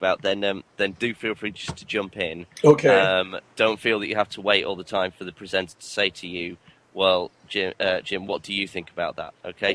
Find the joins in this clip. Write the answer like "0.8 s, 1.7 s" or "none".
8.5 s